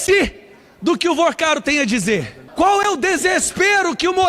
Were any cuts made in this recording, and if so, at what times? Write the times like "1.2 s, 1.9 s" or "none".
2.4 s